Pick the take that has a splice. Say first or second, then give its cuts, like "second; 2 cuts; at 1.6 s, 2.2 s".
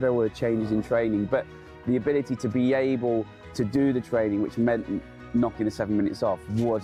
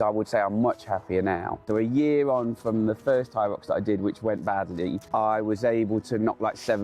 second; 2 cuts; at 1.6 s, 5.0 s